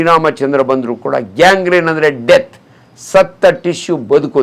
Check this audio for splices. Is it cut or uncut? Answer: uncut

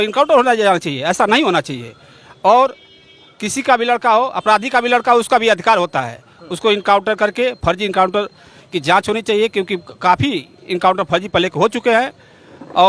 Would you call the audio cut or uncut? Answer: uncut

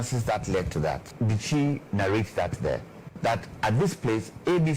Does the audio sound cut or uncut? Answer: cut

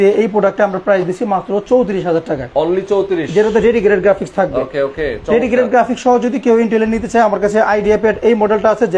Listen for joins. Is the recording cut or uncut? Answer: uncut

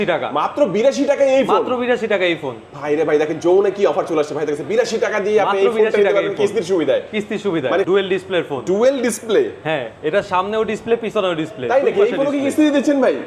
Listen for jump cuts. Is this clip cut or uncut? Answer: cut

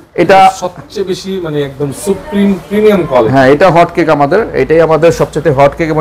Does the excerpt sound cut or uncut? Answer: uncut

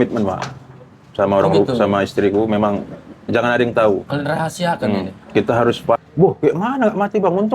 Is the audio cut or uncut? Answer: cut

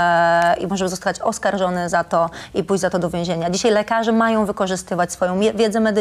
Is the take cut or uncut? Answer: uncut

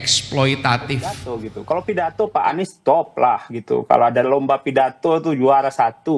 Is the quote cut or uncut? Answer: cut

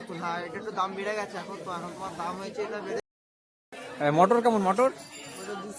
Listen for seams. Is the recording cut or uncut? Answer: cut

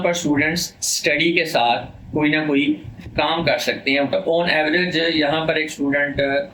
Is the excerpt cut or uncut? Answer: cut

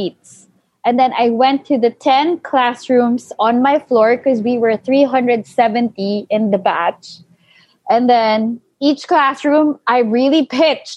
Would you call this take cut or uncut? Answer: uncut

